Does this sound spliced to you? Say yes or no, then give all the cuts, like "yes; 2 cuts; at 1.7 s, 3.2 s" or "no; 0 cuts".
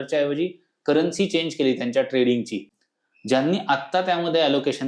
yes; 1 cut; at 2.6 s